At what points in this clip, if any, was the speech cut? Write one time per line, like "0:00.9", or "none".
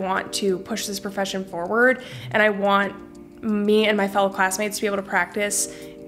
none